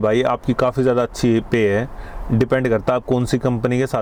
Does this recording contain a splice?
no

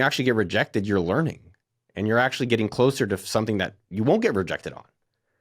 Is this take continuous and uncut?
yes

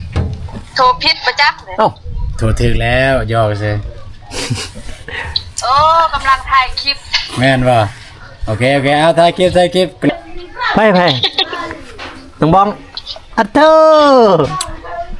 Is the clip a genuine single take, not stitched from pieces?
no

